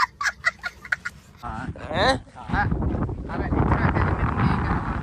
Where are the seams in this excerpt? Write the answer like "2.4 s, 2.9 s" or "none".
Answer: none